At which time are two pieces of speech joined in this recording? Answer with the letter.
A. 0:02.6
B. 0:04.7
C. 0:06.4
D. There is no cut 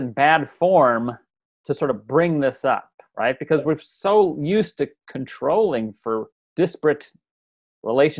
C